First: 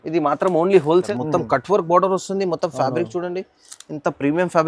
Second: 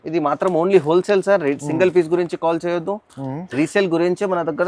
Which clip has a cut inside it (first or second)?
first